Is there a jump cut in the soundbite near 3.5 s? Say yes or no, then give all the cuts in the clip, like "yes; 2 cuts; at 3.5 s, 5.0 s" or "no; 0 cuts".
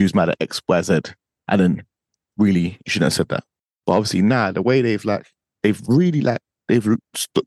yes; 1 cut; at 3.5 s